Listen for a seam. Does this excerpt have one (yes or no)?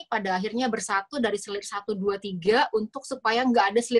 no